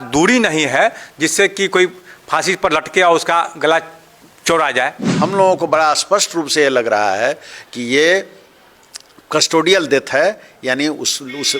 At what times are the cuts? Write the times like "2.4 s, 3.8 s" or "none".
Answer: 5.0 s